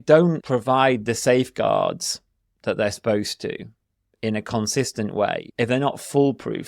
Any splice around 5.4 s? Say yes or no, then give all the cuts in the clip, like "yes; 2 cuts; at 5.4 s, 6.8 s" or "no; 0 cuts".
yes; 1 cut; at 5.4 s